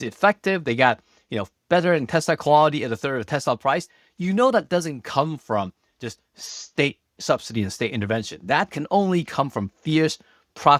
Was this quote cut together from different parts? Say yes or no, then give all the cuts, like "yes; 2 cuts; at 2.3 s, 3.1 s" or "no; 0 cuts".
no; 0 cuts